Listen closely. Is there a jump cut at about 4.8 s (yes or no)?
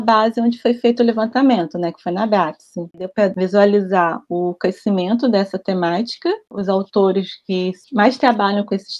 no